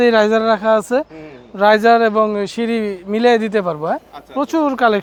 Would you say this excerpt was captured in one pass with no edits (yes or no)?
yes